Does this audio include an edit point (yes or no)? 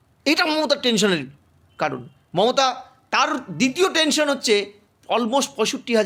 no